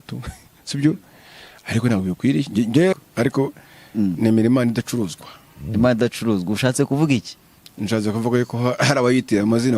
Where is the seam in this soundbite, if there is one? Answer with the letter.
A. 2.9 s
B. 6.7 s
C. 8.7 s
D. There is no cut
A